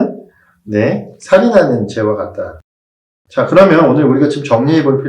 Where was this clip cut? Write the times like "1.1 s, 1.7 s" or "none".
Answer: 2.9 s